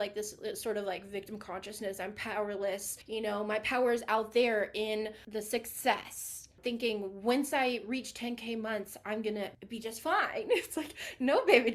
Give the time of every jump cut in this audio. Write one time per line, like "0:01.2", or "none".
0:02.9
0:05.2
0:06.6
0:09.6